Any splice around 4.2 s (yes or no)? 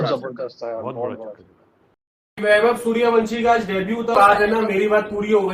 yes